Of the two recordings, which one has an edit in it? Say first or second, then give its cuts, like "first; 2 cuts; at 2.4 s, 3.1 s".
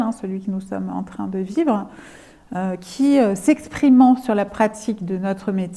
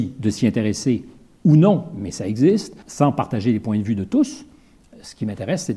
second; 1 cut; at 2.8 s